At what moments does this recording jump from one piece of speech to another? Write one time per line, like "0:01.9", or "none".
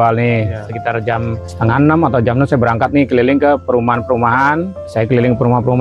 0:01.5
0:04.8

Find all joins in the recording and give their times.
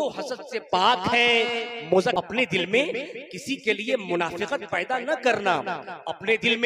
0:02.1

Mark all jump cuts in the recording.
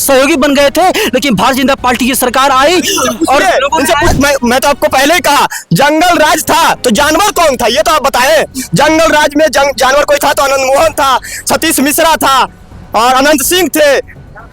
0:04.1

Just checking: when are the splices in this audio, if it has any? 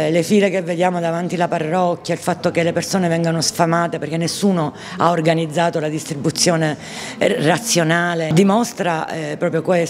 0:08.3

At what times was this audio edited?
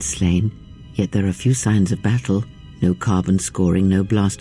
none

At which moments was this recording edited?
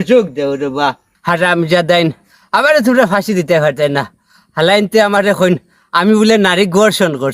0:01.1

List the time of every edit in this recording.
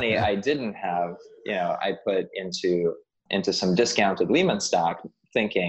none

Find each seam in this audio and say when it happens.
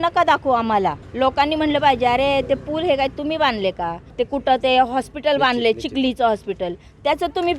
0:01.0
0:04.0

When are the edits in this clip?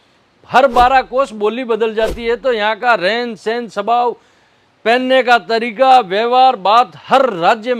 none

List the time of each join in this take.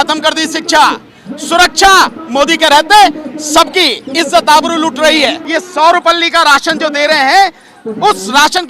0:05.4

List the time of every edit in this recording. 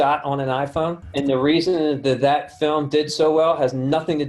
0:01.0

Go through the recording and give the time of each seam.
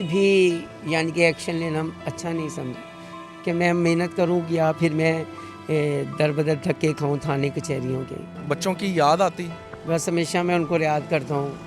0:08.3

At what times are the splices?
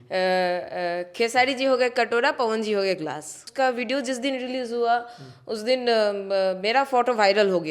0:03.4

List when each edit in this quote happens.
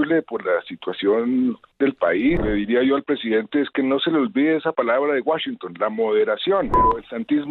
0:02.4
0:06.7

